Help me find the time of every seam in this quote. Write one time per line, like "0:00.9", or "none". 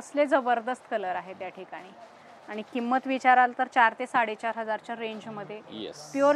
none